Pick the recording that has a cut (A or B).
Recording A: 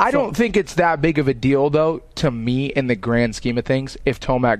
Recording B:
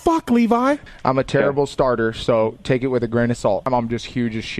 B